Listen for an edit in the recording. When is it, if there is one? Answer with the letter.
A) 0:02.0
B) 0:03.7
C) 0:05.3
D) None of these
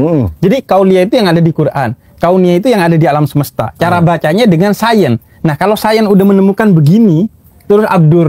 D